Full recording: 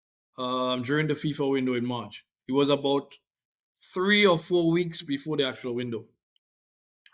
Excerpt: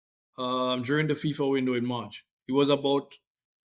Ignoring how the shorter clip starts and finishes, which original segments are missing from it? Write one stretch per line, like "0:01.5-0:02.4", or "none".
none